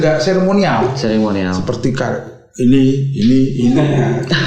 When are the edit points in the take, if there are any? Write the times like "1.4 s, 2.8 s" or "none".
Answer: none